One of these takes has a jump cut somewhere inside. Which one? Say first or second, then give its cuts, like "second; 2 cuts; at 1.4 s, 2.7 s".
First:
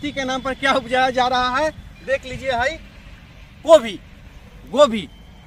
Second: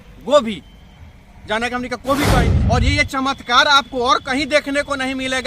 second; 1 cut; at 2.4 s